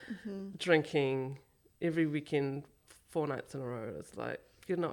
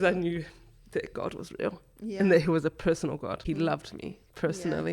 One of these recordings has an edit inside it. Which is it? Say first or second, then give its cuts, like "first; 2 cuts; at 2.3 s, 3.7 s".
second; 1 cut; at 3.4 s